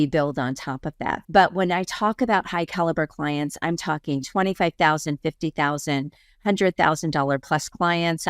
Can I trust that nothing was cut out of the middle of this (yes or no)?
no